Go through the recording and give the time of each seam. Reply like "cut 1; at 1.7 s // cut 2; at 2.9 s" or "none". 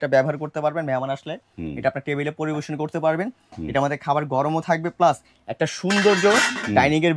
none

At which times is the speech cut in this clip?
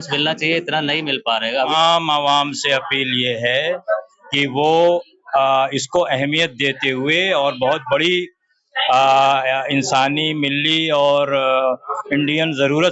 cut 1; at 1.5 s

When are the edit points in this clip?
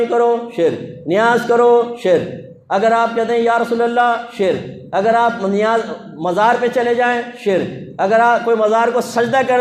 none

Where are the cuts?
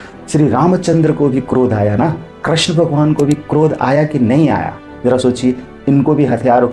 none

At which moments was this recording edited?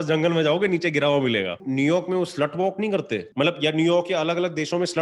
cut 1; at 1.6 s // cut 2; at 3.3 s

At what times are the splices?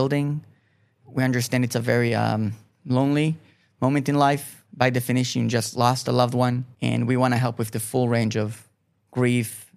cut 1; at 2.7 s // cut 2; at 4.6 s // cut 3; at 6.7 s

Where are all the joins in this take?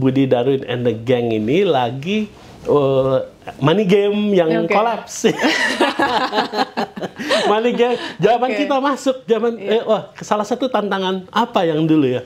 none

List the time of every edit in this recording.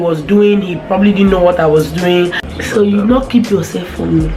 cut 1; at 2.5 s

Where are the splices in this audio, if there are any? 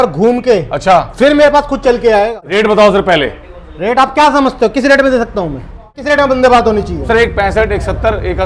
cut 1; at 2.4 s // cut 2; at 6.0 s

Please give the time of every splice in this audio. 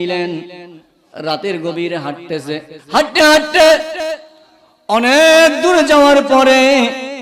cut 1; at 2.7 s

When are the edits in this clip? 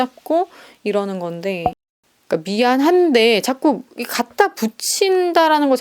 cut 1; at 1.8 s

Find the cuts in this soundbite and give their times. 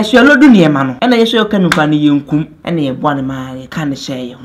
cut 1; at 0.9 s // cut 2; at 2.6 s // cut 3; at 3.6 s

